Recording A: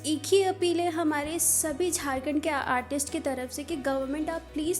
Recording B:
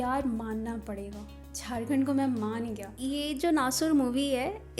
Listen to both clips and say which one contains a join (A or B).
B